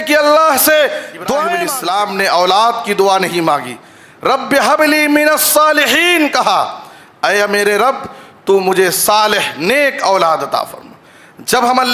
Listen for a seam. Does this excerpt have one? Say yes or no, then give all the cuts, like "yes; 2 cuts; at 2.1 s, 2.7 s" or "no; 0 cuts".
yes; 1 cut; at 1.7 s